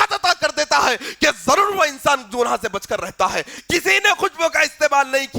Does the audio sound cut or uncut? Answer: cut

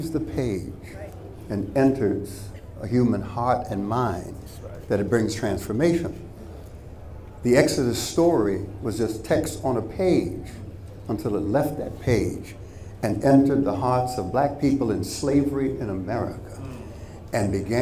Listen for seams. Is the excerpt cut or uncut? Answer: uncut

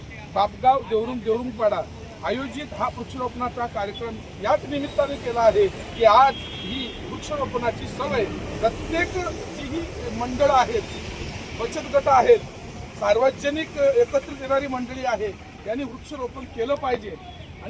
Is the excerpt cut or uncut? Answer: uncut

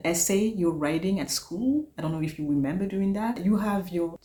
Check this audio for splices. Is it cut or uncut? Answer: uncut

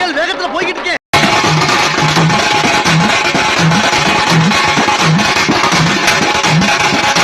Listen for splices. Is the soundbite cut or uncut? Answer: cut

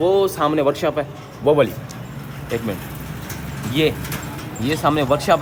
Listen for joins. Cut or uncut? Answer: uncut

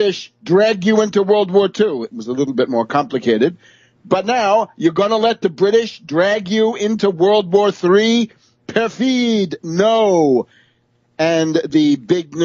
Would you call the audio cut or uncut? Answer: cut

